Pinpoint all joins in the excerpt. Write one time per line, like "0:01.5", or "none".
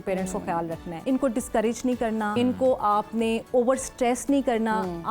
0:00.9
0:02.3